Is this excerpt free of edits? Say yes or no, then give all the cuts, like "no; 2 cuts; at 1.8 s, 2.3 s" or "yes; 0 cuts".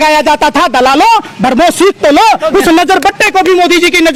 yes; 0 cuts